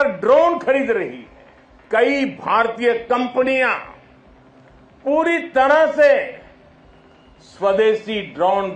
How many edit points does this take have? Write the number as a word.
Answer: one